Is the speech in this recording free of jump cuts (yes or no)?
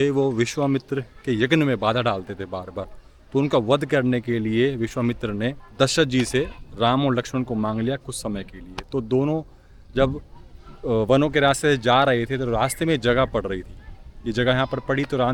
yes